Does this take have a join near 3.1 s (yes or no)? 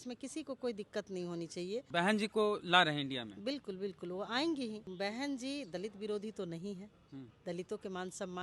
no